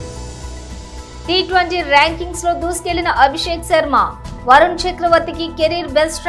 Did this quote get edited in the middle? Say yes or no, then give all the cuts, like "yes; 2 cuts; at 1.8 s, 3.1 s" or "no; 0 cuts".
no; 0 cuts